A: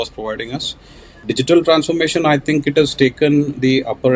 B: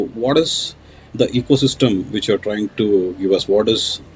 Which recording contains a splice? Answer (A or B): A